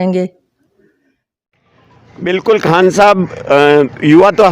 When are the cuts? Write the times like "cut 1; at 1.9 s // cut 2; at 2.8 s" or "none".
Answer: cut 1; at 1.3 s